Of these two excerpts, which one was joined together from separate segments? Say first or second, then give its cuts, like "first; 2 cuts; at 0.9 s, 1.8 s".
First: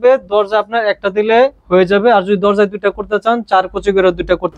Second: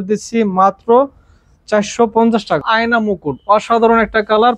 second; 1 cut; at 2.6 s